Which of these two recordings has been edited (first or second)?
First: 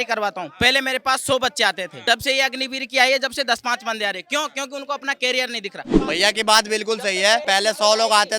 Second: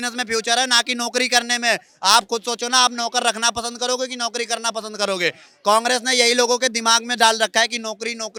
first